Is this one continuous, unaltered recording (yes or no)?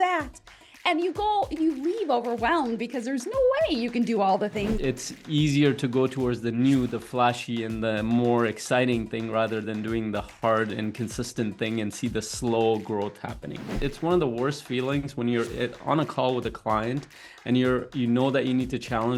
no